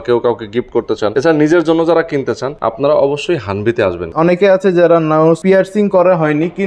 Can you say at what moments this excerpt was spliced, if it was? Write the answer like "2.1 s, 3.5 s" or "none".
1.1 s, 2.5 s, 4.1 s, 5.4 s